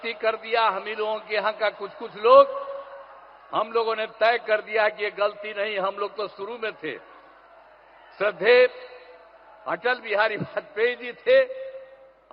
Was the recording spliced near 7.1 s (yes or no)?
no